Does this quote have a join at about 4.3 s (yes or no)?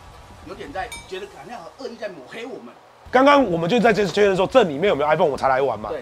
no